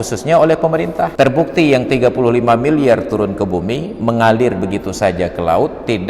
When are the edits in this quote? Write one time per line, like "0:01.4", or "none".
0:01.1